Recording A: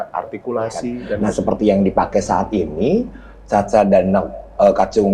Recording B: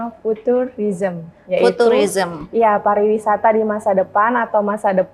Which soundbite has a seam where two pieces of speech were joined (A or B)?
A